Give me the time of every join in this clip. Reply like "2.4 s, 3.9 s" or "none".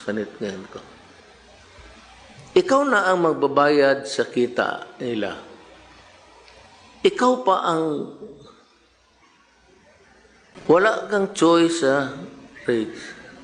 10.6 s